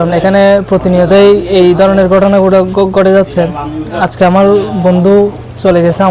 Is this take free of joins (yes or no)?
yes